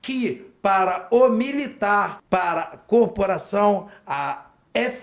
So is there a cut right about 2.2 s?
yes; 1 cut; at 2.2 s

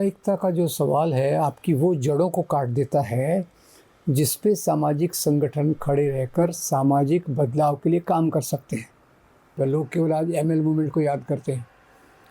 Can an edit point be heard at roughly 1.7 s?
no; 1 cut; at 9.6 s

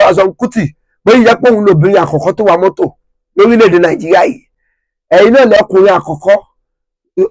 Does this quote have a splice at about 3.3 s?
no; 1 cut; at 5.6 s

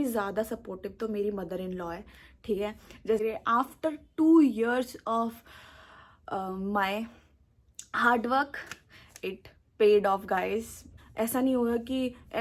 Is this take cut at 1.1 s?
no; 2 cuts; at 3.2 s, 11.0 s

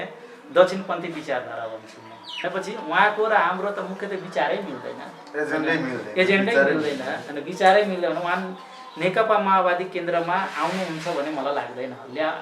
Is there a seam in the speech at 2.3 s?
yes; 1 cut; at 2.3 s

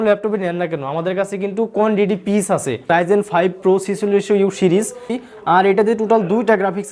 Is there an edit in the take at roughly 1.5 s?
no; 2 cuts; at 2.9 s, 5.1 s

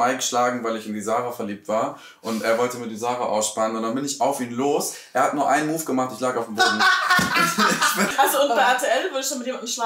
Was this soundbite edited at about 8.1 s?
yes; 1 cut; at 8.1 s

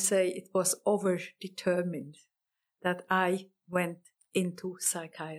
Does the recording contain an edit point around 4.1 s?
yes; 1 cut; at 4.1 s

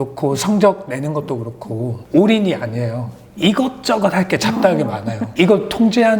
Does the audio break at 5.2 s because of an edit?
yes; 2 cuts; at 2.0 s, 5.2 s

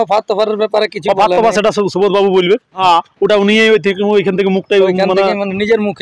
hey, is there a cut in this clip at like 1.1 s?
no; 1 cut; at 2.8 s

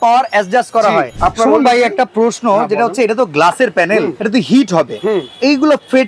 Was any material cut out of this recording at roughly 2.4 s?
no; 2 cuts; at 1.1 s, 4.2 s

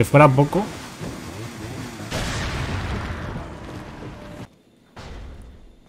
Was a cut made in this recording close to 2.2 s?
no; 1 cut; at 4.5 s

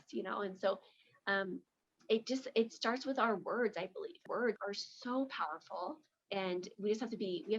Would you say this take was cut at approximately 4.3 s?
yes; 2 cuts; at 4.3 s, 6.2 s

